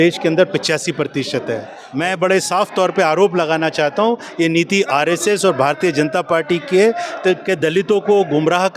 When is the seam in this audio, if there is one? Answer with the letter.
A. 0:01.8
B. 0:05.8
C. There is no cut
A